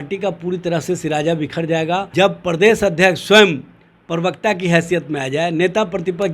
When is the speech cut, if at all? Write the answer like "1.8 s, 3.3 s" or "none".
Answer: 2.1 s

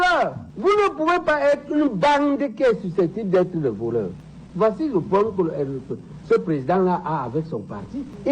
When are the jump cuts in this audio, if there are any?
4.1 s

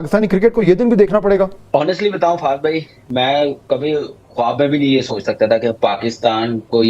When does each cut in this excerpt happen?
1.6 s

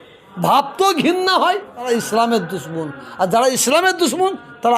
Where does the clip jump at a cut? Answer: 1.9 s

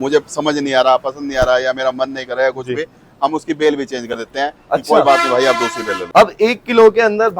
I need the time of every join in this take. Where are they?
5.9 s

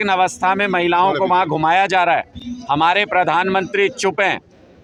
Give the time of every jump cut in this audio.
none

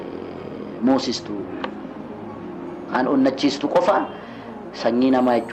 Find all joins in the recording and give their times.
none

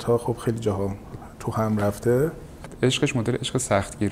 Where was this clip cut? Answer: 2.7 s

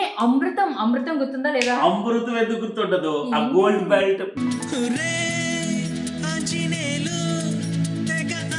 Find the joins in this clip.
none

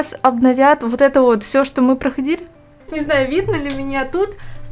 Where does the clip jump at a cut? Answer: 2.9 s

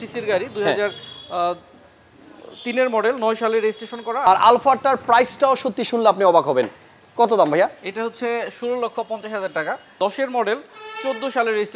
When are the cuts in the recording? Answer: 4.3 s, 9.9 s

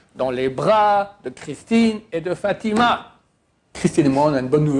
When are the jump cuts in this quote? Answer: 3.7 s

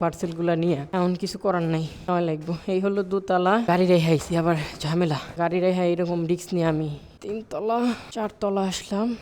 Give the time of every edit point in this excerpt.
0.9 s, 2.1 s, 3.7 s, 5.3 s, 7.1 s, 8.1 s

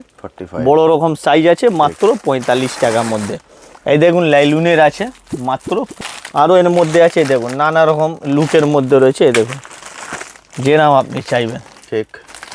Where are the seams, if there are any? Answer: 5.9 s

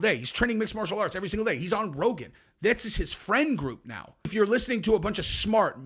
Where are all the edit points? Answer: 4.3 s

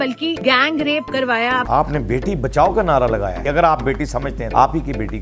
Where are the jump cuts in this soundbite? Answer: 1.7 s, 3.4 s, 4.4 s

